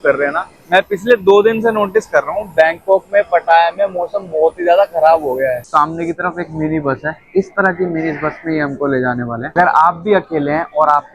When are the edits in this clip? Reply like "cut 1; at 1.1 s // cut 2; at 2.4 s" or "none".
cut 1; at 5.6 s // cut 2; at 9.5 s